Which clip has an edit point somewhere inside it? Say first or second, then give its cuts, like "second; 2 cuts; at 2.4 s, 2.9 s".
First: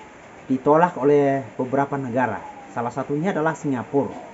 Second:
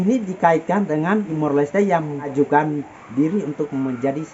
second; 2 cuts; at 1.3 s, 2.3 s